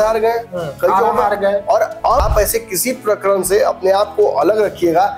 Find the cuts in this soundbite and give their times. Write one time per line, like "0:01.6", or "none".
0:02.2